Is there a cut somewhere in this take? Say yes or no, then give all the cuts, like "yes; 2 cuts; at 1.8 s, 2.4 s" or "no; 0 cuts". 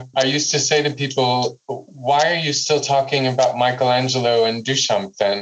no; 0 cuts